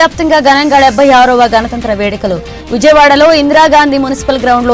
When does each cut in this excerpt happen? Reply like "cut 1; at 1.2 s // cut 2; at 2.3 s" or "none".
none